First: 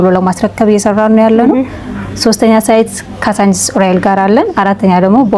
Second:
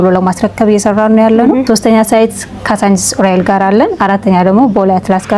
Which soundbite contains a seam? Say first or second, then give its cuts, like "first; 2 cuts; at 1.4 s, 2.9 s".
second; 1 cut; at 1.6 s